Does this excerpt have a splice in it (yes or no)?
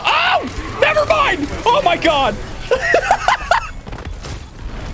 no